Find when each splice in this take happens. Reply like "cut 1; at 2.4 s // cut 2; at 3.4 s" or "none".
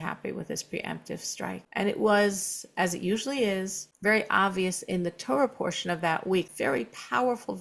cut 1; at 6.5 s